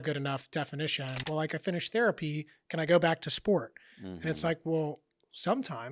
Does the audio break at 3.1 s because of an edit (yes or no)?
no